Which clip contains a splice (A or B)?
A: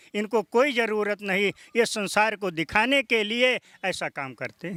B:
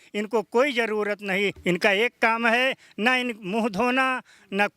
B